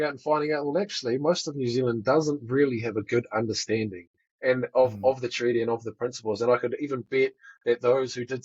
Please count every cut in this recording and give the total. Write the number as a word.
zero